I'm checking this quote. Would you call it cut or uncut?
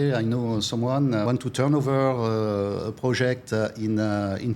cut